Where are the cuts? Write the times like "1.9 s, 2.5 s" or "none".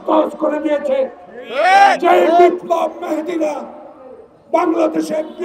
none